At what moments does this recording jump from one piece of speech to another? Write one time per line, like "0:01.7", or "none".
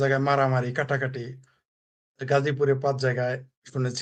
none